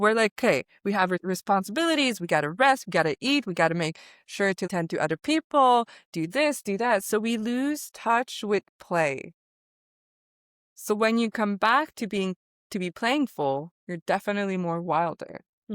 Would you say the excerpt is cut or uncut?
cut